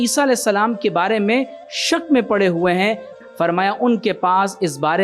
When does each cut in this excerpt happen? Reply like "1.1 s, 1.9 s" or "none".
3.2 s